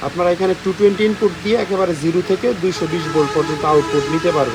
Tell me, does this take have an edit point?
no; 0 cuts

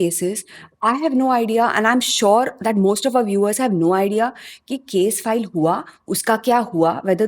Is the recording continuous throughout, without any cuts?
yes; 0 cuts

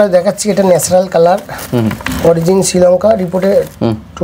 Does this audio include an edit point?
no; 0 cuts

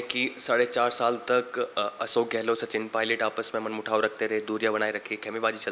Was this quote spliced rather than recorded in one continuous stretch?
no; 0 cuts

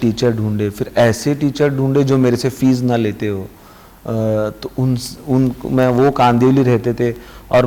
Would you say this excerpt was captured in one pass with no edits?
yes; 0 cuts

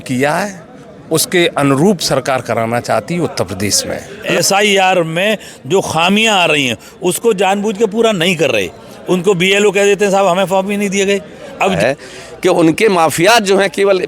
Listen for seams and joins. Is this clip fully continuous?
no; 2 cuts; at 4.3 s, 11.8 s

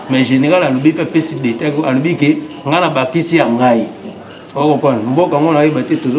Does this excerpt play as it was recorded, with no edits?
yes; 0 cuts

